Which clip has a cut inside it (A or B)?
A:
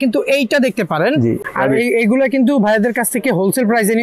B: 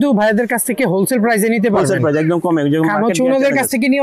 A